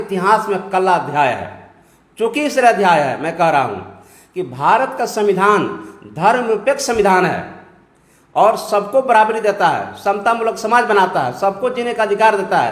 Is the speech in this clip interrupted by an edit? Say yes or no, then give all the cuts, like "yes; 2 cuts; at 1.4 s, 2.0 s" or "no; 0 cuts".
no; 0 cuts